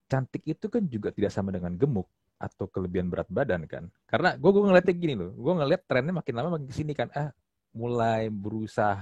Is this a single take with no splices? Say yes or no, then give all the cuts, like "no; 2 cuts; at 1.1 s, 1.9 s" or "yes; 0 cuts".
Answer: yes; 0 cuts